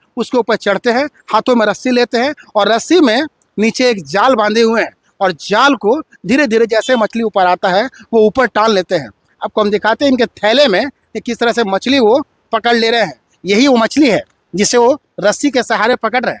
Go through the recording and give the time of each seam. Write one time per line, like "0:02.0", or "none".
none